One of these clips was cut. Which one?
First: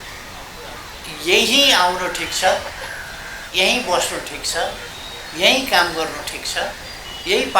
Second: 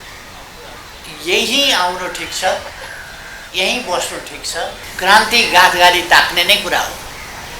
second; 1 cut; at 4.8 s

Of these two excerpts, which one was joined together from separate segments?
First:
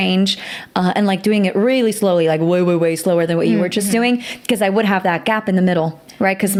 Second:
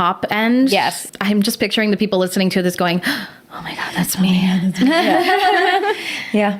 second; 1 cut; at 1.0 s

